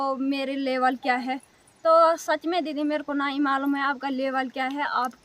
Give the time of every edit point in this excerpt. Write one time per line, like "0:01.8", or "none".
none

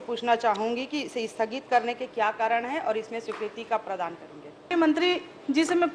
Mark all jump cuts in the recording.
0:04.7

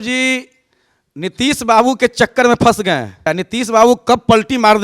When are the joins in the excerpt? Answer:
0:03.3

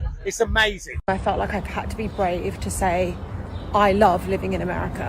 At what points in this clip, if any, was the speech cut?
0:00.9

